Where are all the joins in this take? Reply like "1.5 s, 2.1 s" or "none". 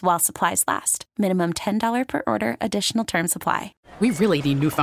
3.8 s